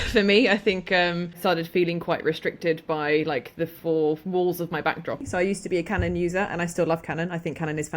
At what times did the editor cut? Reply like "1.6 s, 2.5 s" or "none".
1.4 s, 5.3 s